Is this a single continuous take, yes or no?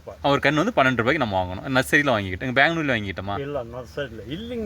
yes